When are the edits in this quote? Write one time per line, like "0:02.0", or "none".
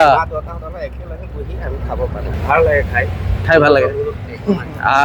0:02.3